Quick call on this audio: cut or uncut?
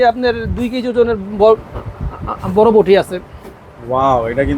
uncut